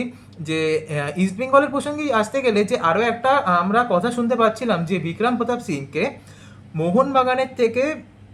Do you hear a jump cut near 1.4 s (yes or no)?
no